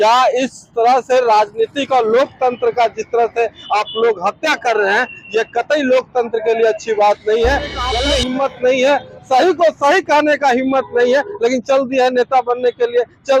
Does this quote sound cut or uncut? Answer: cut